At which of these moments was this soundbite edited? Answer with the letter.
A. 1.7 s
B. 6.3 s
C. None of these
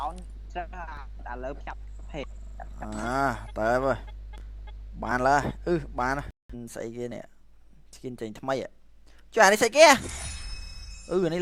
C